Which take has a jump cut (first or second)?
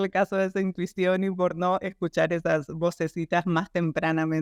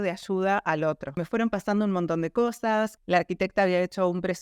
second